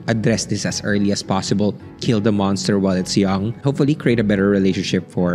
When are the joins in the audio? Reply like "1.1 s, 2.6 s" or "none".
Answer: 3.6 s